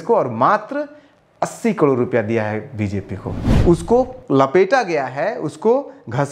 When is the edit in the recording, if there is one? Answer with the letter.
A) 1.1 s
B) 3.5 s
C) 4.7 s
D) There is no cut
B